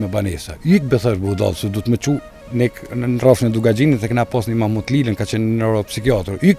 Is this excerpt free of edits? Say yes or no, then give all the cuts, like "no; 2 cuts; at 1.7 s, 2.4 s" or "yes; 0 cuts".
yes; 0 cuts